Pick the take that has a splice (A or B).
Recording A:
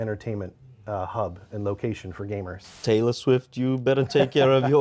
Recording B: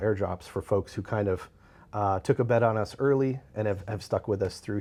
A